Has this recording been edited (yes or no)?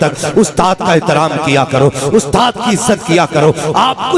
no